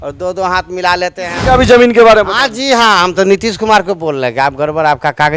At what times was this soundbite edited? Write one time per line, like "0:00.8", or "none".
0:01.2